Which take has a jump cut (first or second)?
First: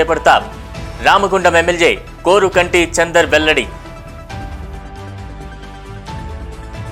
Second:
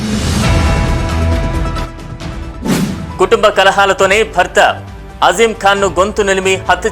second